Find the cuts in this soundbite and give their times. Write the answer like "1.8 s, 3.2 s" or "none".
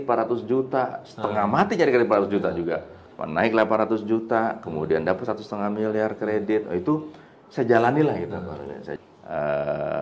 8.9 s